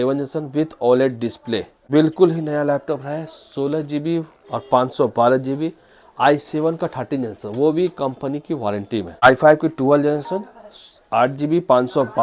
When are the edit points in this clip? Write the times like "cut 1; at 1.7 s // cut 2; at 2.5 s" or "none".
cut 1; at 1.8 s // cut 2; at 9.2 s